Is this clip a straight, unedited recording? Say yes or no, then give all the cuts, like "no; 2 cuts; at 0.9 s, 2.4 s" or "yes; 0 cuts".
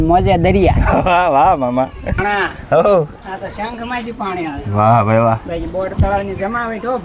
no; 1 cut; at 2.1 s